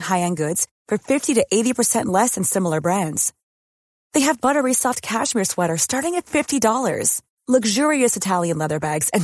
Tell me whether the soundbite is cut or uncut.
uncut